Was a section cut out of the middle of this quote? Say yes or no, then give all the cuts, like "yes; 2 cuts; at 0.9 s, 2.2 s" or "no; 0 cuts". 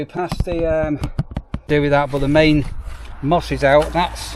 yes; 1 cut; at 1.6 s